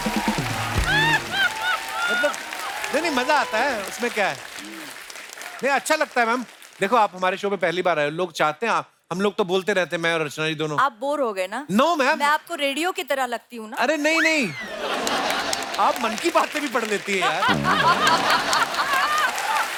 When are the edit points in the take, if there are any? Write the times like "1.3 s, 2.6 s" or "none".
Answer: none